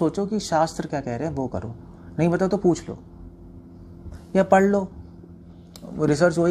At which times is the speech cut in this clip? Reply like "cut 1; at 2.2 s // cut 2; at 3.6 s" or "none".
none